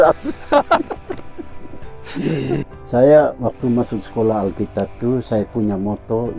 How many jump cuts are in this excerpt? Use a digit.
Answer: 1